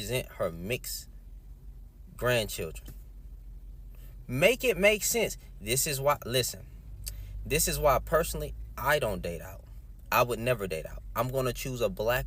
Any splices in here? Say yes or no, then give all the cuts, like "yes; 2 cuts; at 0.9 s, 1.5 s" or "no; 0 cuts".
no; 0 cuts